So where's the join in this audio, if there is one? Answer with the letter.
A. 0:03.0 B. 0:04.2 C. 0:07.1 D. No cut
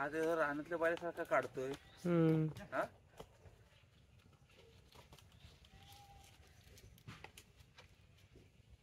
D